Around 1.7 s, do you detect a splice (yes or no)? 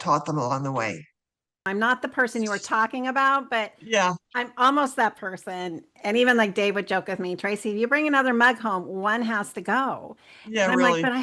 yes